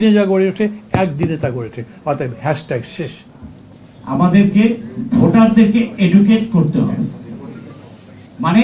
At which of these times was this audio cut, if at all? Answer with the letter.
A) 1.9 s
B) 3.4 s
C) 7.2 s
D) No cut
B